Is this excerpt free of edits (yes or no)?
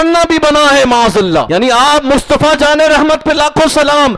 no